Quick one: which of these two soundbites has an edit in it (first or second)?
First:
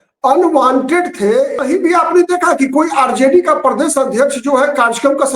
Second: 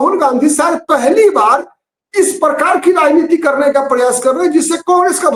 first